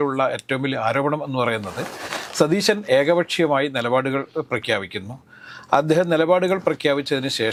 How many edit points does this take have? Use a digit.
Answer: 0